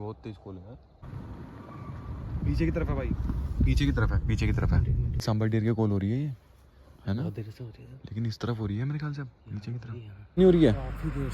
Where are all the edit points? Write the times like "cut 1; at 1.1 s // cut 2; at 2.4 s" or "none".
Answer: cut 1; at 1.0 s // cut 2; at 5.2 s // cut 3; at 10.4 s